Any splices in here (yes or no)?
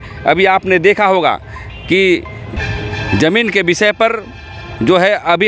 yes